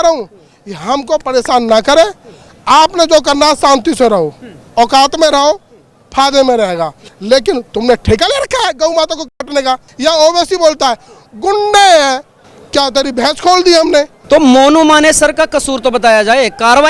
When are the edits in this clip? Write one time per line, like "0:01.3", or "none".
0:07.1
0:09.9
0:14.2